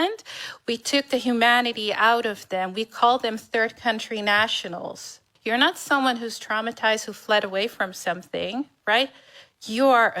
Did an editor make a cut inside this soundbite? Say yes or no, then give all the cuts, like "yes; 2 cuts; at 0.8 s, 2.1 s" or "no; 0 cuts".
yes; 1 cut; at 5.3 s